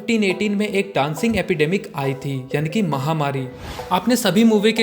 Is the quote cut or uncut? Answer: cut